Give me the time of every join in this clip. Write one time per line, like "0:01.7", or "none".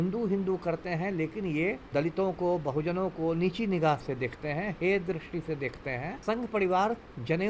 0:01.8
0:06.1